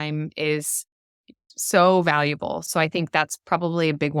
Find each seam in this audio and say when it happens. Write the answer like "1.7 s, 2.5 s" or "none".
1.4 s, 2.6 s